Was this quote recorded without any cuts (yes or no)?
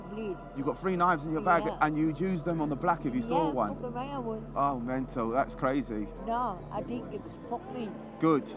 yes